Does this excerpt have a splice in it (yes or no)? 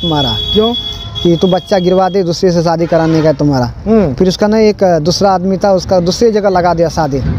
no